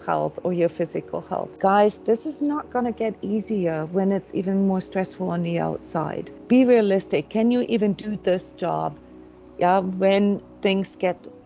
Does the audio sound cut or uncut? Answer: cut